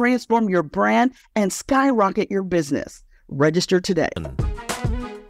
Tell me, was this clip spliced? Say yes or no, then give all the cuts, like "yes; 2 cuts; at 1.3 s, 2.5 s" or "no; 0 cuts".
yes; 1 cut; at 4.4 s